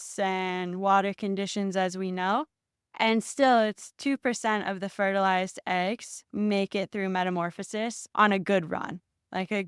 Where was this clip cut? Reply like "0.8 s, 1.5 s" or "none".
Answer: none

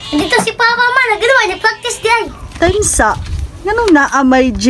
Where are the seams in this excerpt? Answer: 2.4 s

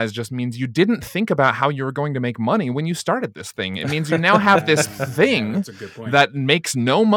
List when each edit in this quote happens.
none

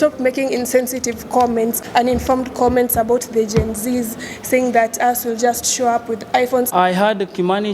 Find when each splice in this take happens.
1.8 s, 6.7 s

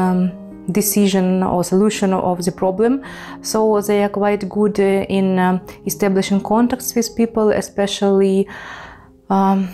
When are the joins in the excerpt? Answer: none

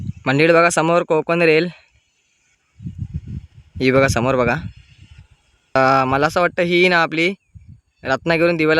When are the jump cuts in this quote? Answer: 5.8 s

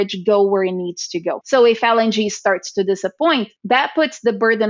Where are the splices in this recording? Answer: 1.4 s, 3.5 s

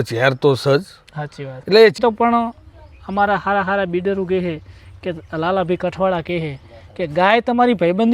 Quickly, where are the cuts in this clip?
2.0 s

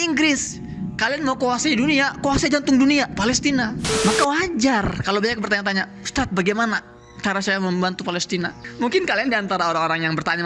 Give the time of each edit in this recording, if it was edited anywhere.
3.9 s, 8.6 s

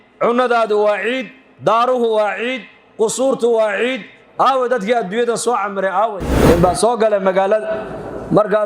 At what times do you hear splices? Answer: 6.3 s

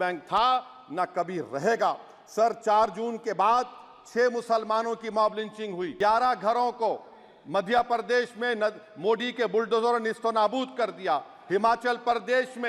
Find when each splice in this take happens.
5.9 s

